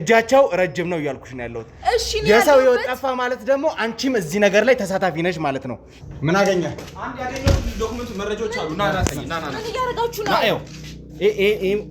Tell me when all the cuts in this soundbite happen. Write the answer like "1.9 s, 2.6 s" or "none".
5.9 s